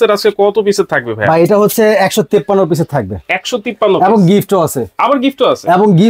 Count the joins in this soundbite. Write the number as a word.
zero